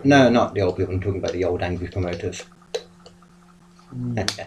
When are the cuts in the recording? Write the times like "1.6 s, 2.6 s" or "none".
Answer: none